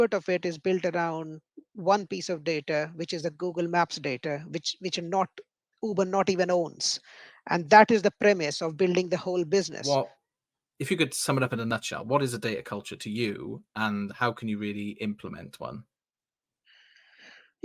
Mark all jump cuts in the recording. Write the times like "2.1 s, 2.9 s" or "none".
9.8 s